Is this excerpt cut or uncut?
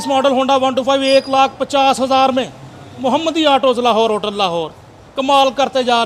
uncut